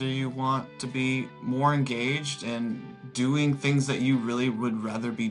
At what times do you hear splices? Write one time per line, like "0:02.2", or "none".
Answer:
none